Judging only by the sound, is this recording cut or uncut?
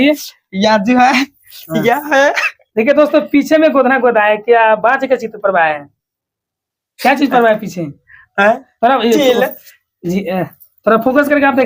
uncut